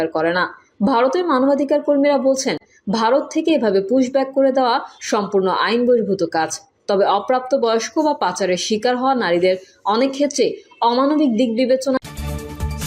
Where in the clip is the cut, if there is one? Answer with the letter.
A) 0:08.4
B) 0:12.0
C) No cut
B